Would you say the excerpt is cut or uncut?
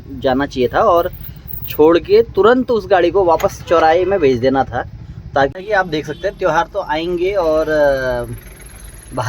cut